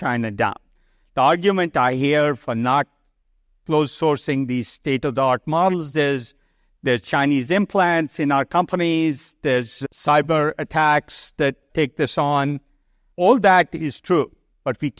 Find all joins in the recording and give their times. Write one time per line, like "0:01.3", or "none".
0:09.7